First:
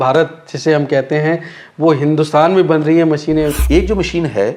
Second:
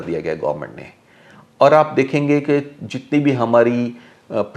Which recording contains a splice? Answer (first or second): first